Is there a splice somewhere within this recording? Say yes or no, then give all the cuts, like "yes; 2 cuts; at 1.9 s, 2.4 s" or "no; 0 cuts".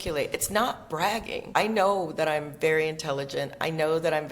yes; 1 cut; at 1.5 s